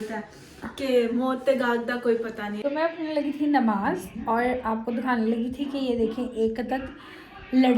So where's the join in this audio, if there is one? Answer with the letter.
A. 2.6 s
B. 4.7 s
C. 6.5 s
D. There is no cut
A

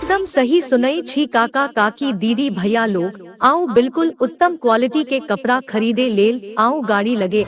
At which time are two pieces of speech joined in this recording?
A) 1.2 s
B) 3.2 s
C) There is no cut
C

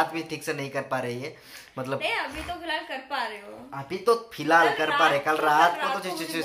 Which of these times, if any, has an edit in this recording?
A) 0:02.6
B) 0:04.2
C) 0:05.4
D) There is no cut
D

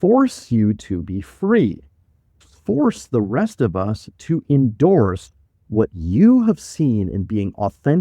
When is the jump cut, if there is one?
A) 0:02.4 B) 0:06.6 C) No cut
A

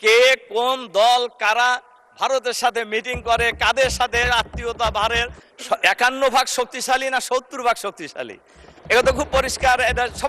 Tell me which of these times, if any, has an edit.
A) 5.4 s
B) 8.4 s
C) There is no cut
A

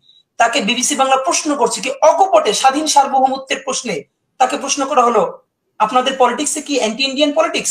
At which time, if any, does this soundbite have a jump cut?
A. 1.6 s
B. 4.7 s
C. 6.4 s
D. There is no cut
D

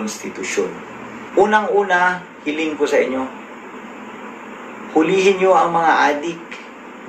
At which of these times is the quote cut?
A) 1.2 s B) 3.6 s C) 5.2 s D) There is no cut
A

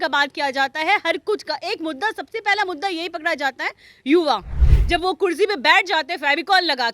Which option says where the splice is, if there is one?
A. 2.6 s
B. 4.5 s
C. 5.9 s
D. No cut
B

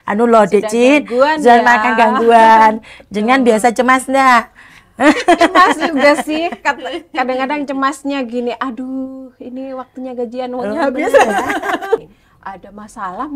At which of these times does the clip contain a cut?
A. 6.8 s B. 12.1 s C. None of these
B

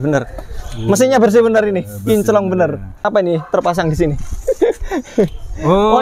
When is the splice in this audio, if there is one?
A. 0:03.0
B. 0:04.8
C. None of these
A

